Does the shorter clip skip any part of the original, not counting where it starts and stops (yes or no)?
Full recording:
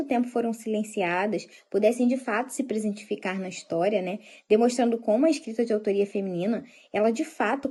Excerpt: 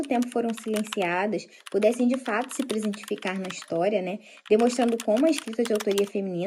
no